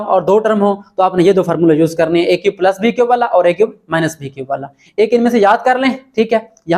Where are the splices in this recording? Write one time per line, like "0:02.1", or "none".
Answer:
none